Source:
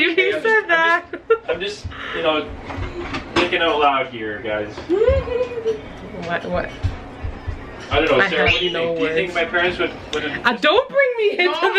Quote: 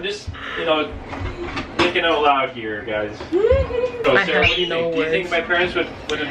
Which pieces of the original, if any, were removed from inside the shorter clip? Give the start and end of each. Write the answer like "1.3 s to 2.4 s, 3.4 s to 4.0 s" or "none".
5.6 s to 8.1 s